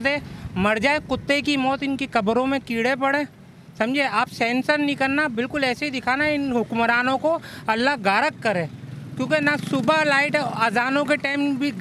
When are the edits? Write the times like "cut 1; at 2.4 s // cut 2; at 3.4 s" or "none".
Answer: none